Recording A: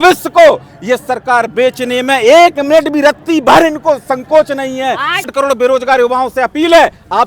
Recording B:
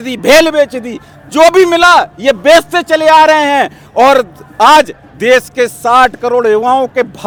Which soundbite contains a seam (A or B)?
A